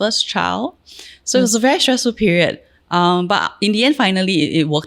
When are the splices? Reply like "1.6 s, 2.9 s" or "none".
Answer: none